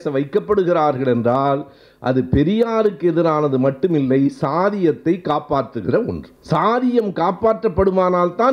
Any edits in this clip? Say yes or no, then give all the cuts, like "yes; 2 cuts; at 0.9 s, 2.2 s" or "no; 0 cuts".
yes; 1 cut; at 6.3 s